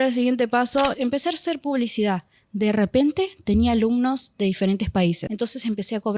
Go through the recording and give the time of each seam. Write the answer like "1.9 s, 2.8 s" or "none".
0.9 s, 5.3 s